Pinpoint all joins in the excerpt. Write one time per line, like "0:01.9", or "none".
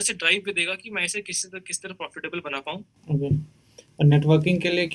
0:02.9